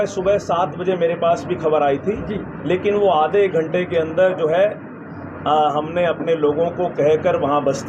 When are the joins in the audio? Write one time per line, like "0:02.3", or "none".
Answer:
none